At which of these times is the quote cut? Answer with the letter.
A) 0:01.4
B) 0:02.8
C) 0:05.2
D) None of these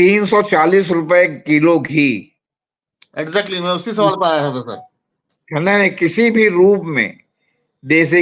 D